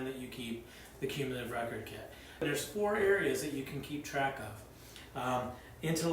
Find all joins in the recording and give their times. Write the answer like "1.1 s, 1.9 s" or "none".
2.4 s